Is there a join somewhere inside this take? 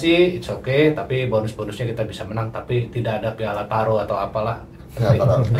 no; 0 cuts

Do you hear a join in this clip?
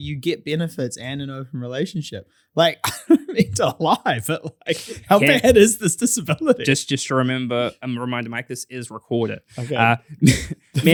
no; 0 cuts

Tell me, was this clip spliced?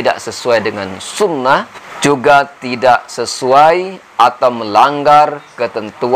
no; 0 cuts

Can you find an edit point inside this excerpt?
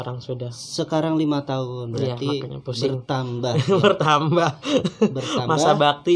no; 0 cuts

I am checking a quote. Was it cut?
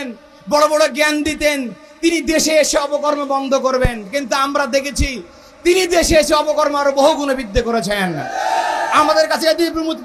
no; 0 cuts

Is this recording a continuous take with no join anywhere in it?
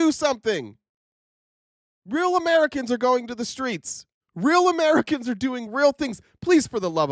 yes; 0 cuts

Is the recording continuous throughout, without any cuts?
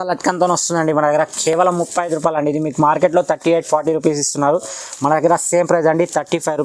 yes; 0 cuts

